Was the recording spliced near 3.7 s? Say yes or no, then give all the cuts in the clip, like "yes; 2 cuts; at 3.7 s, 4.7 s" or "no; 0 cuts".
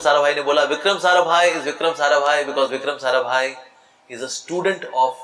no; 0 cuts